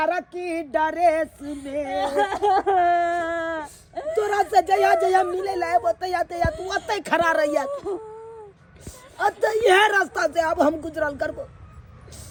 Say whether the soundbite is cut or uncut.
uncut